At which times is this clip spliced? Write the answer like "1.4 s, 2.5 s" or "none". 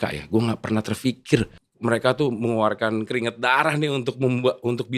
1.6 s